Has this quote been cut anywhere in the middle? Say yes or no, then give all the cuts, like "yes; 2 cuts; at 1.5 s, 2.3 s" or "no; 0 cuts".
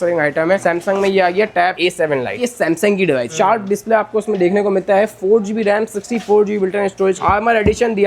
yes; 3 cuts; at 2.4 s, 3.3 s, 7.2 s